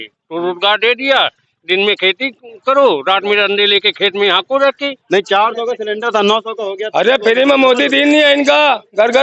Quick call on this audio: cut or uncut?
cut